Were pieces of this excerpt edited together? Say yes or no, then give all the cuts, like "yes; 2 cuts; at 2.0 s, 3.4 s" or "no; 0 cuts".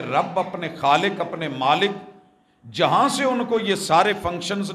no; 0 cuts